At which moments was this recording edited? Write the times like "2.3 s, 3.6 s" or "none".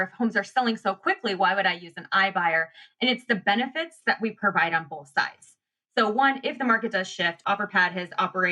7.4 s